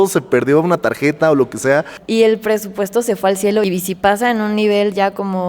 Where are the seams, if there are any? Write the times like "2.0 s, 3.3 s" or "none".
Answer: 2.0 s, 3.6 s